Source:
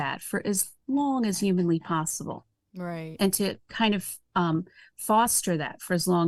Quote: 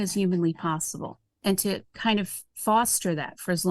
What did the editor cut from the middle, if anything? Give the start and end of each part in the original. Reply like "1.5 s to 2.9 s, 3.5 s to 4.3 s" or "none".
2.5 s to 3.0 s, 4.2 s to 4.8 s